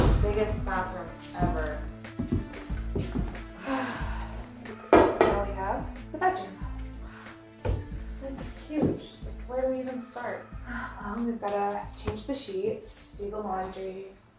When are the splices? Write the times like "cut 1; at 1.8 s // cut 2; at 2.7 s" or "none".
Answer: cut 1; at 8.9 s